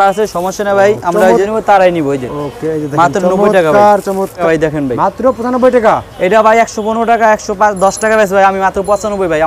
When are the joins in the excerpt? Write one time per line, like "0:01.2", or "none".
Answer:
0:01.5
0:04.4